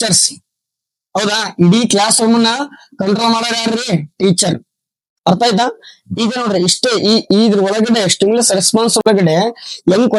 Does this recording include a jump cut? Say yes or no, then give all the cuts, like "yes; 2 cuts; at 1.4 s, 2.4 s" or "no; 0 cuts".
no; 0 cuts